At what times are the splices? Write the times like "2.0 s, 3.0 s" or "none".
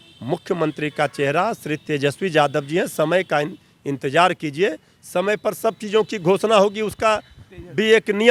none